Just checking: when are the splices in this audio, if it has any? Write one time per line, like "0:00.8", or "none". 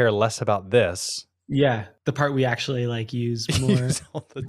0:01.9